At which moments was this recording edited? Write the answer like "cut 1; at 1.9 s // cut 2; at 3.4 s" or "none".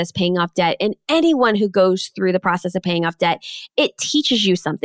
none